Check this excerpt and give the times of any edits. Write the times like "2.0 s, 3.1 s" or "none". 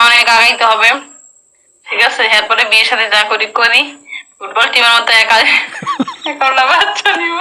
none